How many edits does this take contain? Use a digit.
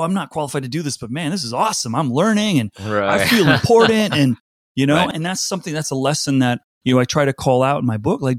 2